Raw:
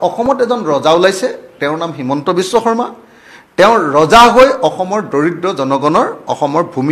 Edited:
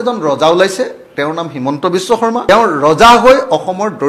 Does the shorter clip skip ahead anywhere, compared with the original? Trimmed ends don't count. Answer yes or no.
yes